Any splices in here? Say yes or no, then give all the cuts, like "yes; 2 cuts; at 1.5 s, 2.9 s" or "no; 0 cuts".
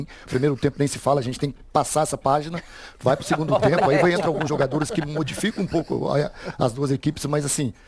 no; 0 cuts